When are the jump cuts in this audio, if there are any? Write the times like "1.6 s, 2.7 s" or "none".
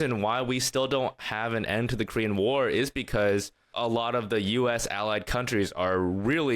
3.7 s